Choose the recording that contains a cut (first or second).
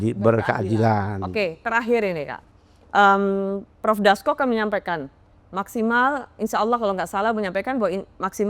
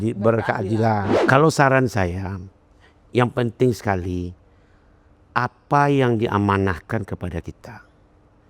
second